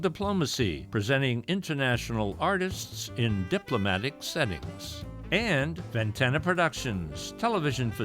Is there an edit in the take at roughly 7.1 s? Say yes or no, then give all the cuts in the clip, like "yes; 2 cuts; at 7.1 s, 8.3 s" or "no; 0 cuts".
no; 2 cuts; at 0.8 s, 5.8 s